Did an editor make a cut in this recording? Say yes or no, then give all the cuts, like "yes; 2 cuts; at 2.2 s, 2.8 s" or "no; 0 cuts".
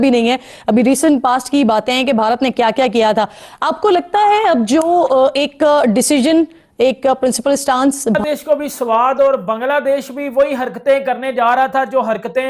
yes; 1 cut; at 8.2 s